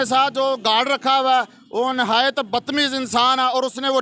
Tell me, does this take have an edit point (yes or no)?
no